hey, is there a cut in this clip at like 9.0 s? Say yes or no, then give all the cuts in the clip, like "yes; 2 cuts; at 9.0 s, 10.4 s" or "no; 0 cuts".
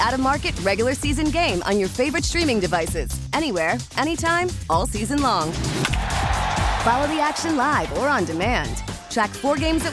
no; 0 cuts